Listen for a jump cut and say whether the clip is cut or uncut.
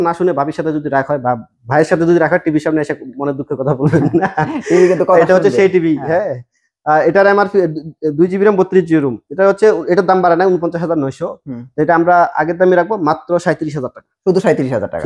uncut